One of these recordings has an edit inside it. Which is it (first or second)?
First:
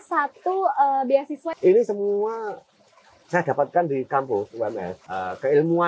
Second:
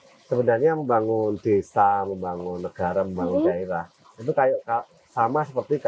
first